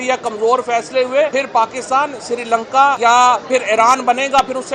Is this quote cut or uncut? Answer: cut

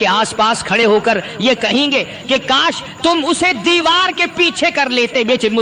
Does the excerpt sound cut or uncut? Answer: uncut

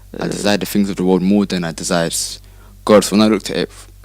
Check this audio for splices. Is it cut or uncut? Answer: uncut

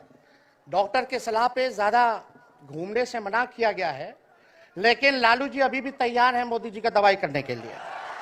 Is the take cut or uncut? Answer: uncut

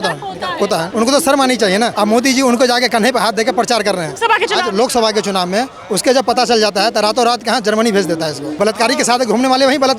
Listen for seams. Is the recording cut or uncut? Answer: cut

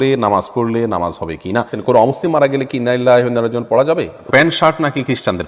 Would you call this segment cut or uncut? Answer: cut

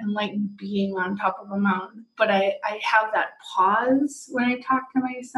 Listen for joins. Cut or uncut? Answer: uncut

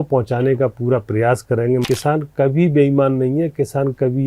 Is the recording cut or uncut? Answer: cut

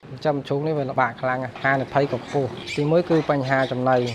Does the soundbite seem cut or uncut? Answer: cut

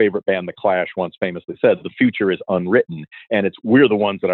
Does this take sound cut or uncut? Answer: uncut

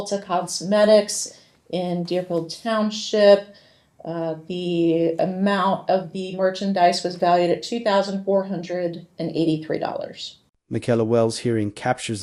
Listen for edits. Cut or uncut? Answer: uncut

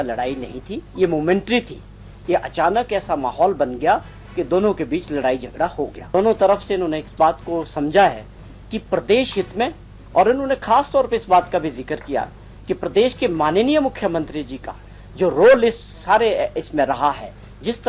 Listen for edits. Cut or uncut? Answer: cut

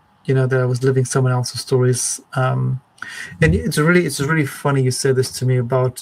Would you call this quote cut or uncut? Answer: uncut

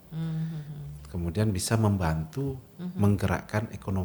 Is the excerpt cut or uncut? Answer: uncut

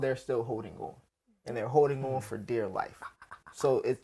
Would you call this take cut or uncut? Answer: uncut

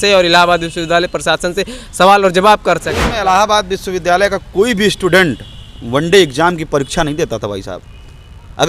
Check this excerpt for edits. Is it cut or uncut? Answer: cut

